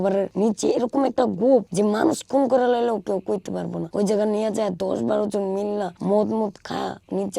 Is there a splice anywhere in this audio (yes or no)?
no